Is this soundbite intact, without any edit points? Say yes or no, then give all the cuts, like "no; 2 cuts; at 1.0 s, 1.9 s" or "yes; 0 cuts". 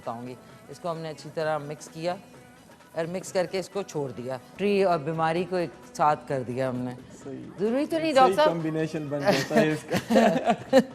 no; 1 cut; at 4.5 s